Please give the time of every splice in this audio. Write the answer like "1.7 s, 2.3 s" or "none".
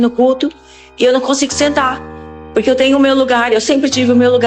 none

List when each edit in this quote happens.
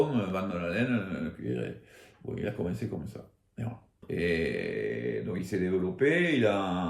4.0 s

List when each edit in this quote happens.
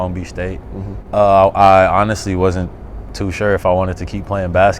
1.0 s

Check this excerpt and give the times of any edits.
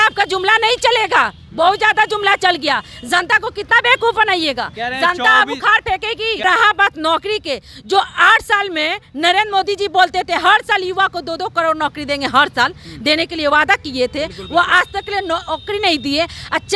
6.4 s

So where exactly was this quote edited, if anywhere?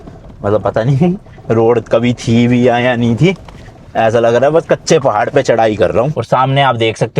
6.2 s

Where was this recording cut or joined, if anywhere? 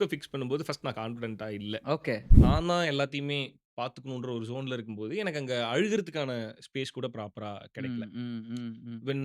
2.3 s

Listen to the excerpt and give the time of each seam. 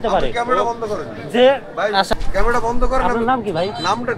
2.1 s

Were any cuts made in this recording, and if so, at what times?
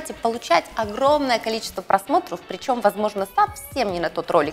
none

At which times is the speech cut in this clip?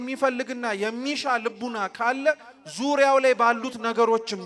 none

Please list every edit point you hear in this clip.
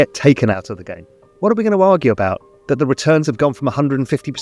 1.2 s

